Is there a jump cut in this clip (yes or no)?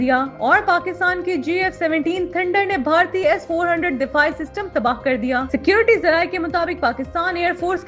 no